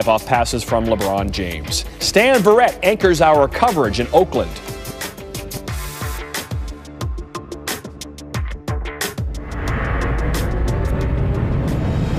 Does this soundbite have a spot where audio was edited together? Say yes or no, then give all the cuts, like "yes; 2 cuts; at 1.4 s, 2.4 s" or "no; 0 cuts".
yes; 1 cut; at 1.1 s